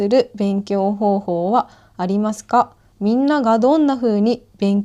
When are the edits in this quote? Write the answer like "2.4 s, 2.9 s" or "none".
2.8 s